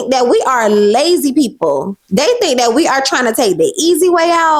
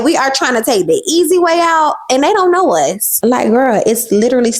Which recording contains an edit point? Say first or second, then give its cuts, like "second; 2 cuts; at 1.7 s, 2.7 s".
second; 1 cut; at 3.1 s